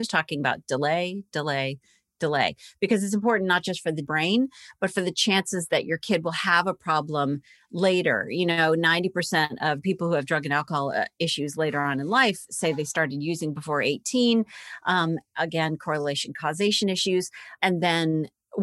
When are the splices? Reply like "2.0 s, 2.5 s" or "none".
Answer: 4.1 s, 9.8 s, 17.5 s